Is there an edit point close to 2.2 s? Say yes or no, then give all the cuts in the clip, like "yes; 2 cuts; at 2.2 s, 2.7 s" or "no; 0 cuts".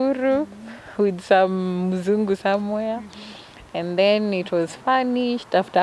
no; 0 cuts